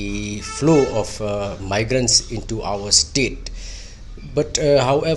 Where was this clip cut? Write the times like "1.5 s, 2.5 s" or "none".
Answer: none